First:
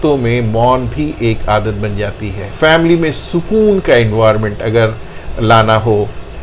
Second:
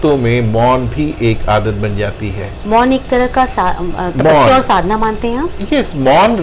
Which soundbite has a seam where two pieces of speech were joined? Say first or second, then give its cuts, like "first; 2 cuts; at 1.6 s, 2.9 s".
first; 1 cut; at 2.4 s